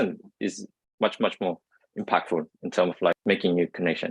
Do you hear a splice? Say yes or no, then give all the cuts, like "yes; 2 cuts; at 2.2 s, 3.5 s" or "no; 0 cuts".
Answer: yes; 1 cut; at 3.1 s